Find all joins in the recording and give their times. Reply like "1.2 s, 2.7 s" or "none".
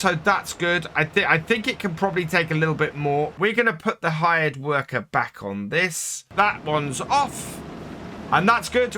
3.3 s, 6.3 s